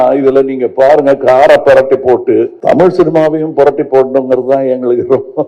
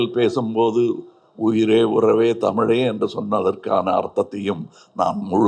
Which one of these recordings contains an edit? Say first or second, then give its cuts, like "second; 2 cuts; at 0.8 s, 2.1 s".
first; 1 cut; at 2.5 s